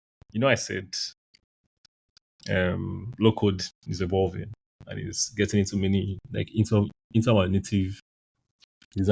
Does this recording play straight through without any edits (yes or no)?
yes